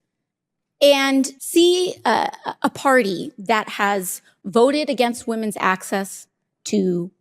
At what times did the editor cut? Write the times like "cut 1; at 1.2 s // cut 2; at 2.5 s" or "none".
cut 1; at 1.4 s

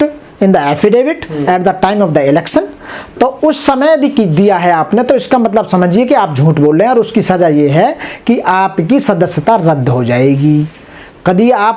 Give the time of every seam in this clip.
none

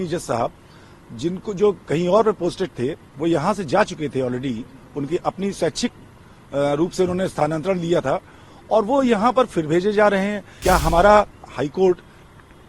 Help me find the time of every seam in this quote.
cut 1; at 10.5 s

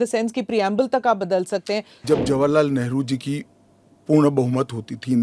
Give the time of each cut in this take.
cut 1; at 1.9 s

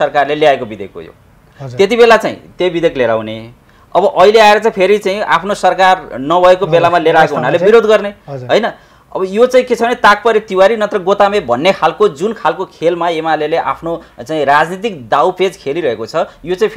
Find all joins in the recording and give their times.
none

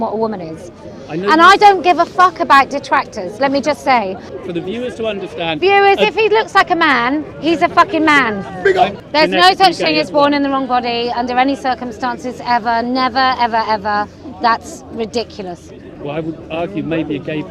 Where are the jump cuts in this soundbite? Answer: cut 1; at 4.4 s // cut 2; at 9.0 s

